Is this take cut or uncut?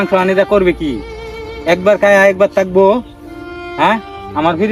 uncut